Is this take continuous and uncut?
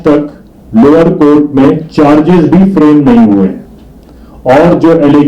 yes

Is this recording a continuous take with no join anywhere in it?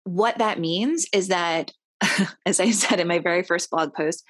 yes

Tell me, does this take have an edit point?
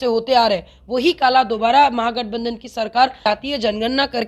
yes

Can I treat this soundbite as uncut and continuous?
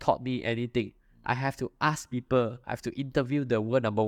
yes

